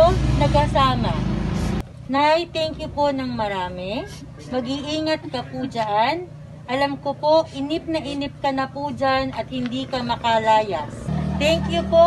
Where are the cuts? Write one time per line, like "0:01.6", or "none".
0:01.8
0:11.1